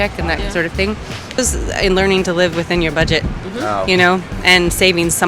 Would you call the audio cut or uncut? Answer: cut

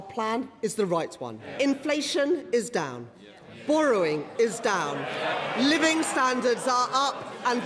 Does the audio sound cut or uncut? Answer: cut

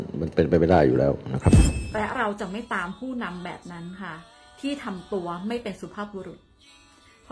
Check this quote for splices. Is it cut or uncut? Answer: cut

